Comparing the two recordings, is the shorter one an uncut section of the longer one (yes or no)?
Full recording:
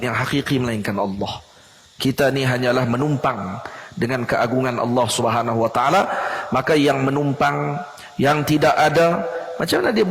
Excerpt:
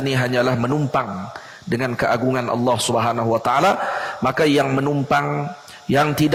yes